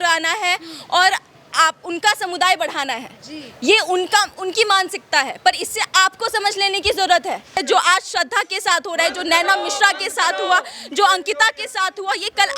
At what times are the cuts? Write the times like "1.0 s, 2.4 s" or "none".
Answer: 7.6 s